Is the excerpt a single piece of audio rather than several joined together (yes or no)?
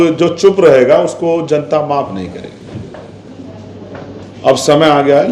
yes